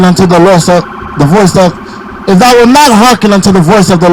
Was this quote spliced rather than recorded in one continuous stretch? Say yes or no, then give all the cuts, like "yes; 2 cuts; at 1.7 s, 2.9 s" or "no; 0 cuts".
no; 0 cuts